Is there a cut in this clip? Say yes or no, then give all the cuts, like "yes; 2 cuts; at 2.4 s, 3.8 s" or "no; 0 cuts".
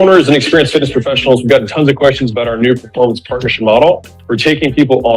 yes; 1 cut; at 1.4 s